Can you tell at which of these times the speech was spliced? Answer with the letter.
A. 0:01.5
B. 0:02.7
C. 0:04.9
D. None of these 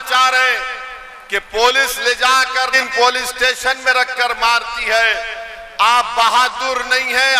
B